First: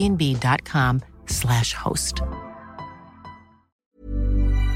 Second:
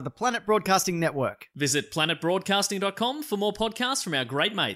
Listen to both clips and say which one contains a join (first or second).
first